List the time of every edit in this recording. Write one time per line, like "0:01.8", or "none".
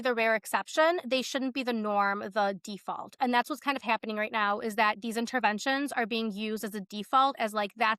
none